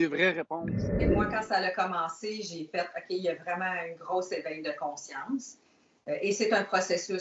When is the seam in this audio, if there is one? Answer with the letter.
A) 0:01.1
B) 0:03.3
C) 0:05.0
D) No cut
A